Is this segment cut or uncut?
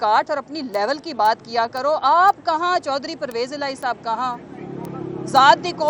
uncut